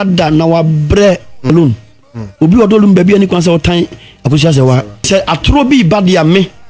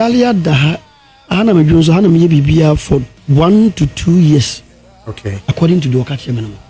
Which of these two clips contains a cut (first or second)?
first